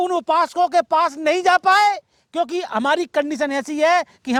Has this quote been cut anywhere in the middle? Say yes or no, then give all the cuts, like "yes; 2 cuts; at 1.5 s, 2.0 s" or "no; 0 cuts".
no; 0 cuts